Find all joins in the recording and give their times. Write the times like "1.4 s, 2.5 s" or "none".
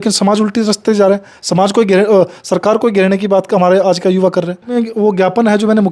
4.7 s